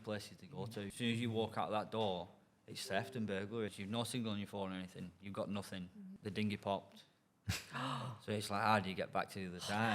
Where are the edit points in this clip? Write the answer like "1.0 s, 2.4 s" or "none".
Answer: 0.9 s, 3.8 s, 6.1 s

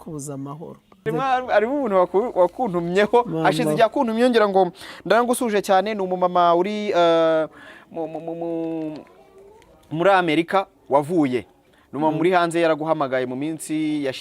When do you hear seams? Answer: 1.1 s

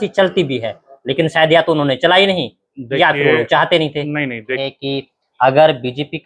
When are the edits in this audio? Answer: 4.6 s

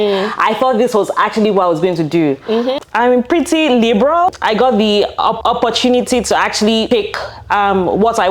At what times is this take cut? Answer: 2.8 s, 4.4 s, 5.4 s, 6.9 s

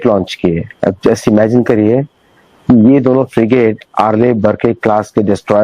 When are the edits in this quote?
none

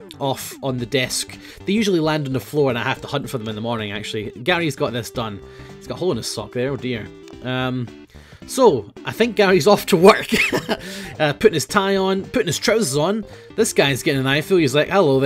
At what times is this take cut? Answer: 9.8 s

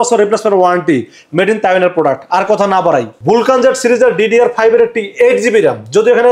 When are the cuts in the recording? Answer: 3.1 s

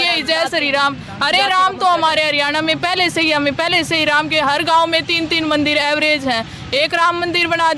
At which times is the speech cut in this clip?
none

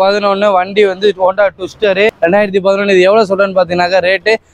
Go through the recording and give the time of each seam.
2.1 s

